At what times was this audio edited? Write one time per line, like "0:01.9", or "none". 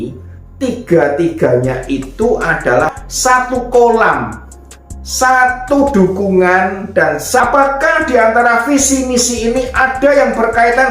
0:03.0
0:07.4